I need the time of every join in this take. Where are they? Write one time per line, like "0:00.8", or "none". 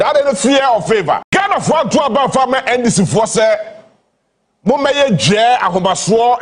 0:01.2